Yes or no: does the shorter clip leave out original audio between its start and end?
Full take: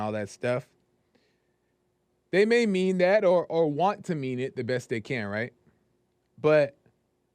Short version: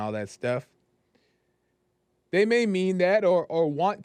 no